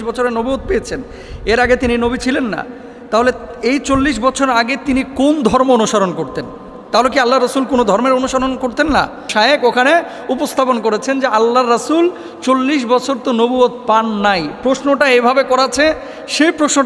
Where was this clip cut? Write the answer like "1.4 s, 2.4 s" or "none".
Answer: 9.3 s